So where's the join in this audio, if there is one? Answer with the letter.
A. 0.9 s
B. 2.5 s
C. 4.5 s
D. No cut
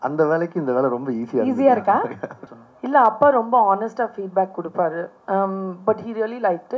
B